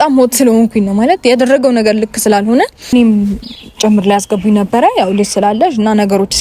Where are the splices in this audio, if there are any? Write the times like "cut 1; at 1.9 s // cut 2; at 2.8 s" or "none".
none